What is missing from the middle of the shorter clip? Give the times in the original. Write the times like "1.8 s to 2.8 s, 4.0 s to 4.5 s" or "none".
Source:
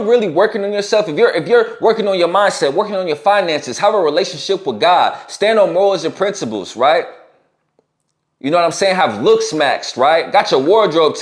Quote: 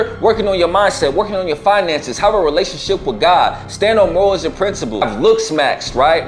6.6 s to 9.0 s